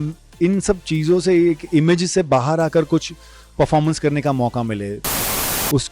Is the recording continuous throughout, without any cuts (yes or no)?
no